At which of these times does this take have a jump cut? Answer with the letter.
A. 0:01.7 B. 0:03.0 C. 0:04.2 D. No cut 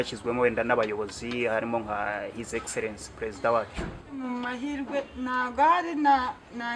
C